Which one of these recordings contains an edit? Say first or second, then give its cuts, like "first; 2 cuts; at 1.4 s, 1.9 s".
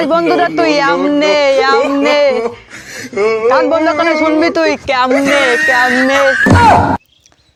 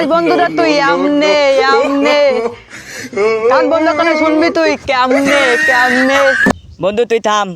second; 1 cut; at 6.5 s